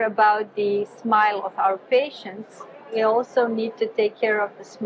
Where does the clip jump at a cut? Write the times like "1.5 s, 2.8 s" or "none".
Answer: none